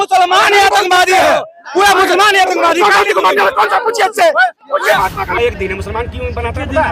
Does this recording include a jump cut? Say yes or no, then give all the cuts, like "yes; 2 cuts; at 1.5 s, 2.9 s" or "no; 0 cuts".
yes; 1 cut; at 5.4 s